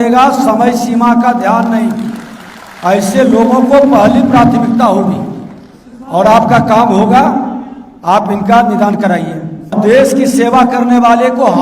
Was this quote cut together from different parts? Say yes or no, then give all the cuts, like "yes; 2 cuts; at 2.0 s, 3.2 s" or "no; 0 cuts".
yes; 1 cut; at 9.7 s